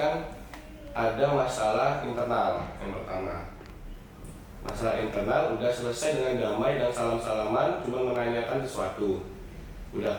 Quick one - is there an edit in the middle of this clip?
no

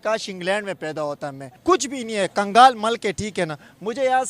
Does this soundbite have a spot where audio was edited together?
yes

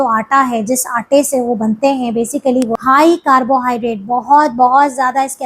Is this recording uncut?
no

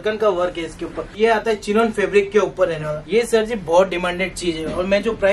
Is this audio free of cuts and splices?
no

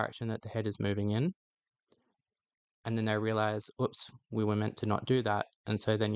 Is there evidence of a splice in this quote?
no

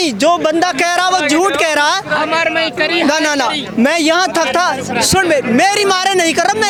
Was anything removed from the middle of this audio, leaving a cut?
no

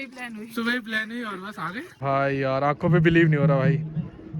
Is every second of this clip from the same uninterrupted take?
no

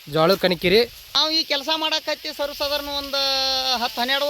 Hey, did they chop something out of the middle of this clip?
yes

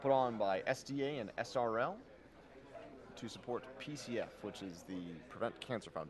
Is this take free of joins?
yes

